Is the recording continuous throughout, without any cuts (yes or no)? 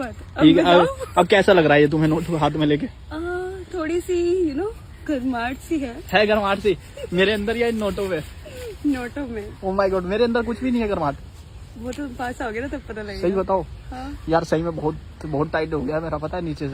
yes